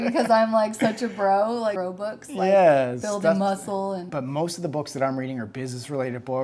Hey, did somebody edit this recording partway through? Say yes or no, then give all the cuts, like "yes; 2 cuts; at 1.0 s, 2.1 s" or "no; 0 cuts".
yes; 2 cuts; at 1.8 s, 4.1 s